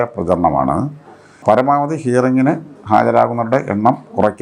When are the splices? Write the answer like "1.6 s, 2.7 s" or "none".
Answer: 1.3 s